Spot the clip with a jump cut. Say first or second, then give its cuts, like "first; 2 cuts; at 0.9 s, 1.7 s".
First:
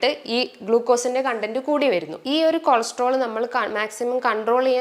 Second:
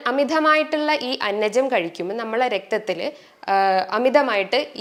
first; 1 cut; at 2.1 s